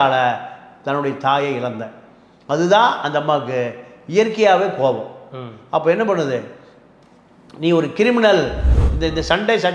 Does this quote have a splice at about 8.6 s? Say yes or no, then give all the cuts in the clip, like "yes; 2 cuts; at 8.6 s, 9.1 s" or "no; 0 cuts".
yes; 1 cut; at 8.6 s